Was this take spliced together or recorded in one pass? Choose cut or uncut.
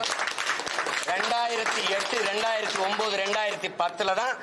uncut